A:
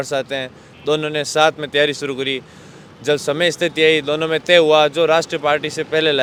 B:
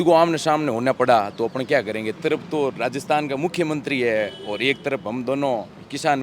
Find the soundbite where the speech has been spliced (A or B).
B